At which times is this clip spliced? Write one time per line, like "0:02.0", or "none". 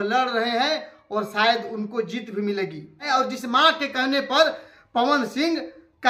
0:03.1